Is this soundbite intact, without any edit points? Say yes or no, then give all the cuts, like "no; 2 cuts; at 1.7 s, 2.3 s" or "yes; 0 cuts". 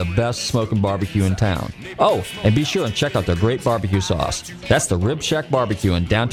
yes; 0 cuts